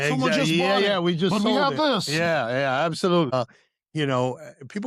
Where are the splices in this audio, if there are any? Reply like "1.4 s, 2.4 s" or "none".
3.3 s